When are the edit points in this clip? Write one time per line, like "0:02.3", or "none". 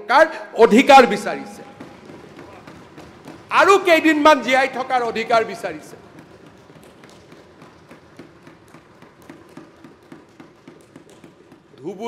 none